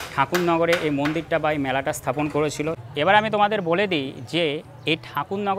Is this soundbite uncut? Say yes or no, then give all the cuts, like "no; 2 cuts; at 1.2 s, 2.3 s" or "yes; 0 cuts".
no; 1 cut; at 2.9 s